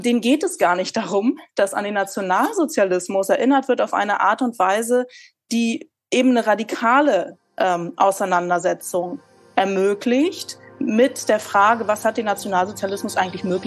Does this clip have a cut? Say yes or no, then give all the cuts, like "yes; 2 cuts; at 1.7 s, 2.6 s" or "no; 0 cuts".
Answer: no; 0 cuts